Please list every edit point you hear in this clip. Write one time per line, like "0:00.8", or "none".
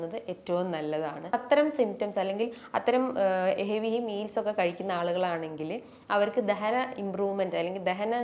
0:01.3